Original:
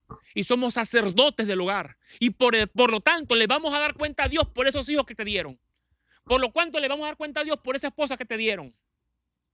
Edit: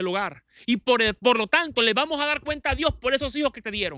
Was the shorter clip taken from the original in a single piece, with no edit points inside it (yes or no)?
yes